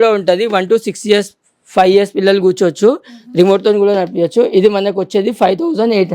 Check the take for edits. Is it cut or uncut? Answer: uncut